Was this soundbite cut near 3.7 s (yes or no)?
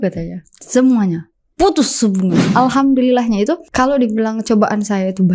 yes